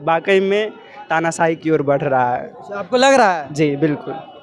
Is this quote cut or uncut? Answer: uncut